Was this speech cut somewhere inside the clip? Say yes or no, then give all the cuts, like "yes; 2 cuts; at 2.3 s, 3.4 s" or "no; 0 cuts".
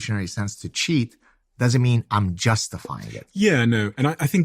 no; 0 cuts